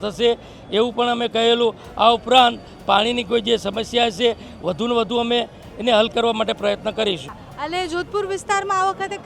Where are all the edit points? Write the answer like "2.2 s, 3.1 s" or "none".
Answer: 7.4 s